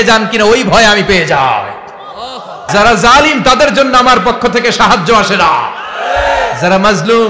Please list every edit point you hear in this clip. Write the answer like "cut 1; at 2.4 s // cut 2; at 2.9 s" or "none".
cut 1; at 2.7 s